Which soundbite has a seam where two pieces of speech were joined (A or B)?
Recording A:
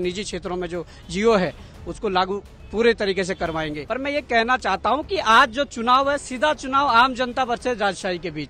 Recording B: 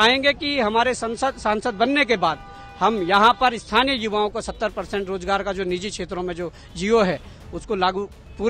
A